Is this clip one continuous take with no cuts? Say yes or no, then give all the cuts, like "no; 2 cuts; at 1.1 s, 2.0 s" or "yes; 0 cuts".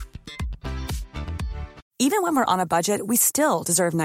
no; 1 cut; at 1.8 s